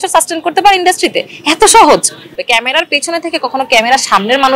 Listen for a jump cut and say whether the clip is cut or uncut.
cut